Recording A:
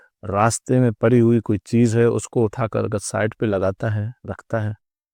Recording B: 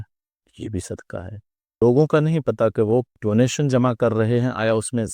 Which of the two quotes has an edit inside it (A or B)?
B